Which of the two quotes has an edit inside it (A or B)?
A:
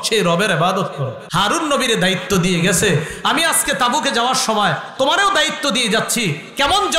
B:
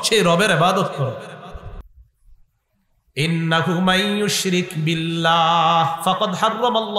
A